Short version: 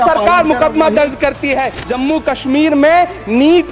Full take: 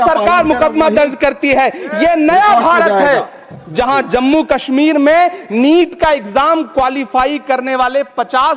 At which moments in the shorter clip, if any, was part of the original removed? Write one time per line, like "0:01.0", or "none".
0:01.8